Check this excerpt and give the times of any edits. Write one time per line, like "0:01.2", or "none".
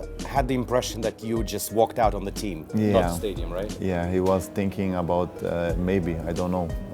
none